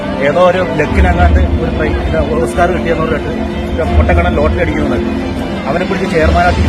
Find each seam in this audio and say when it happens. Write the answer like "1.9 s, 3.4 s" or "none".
none